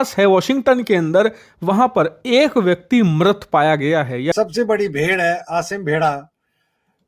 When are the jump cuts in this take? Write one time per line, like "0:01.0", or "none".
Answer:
0:04.3